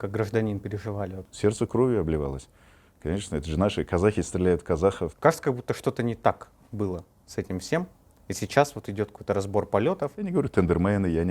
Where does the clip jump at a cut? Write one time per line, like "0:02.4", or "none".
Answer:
0:01.2
0:05.1
0:10.2

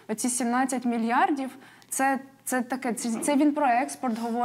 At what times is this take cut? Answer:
none

